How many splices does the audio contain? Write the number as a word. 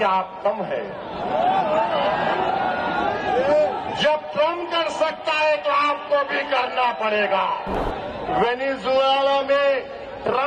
one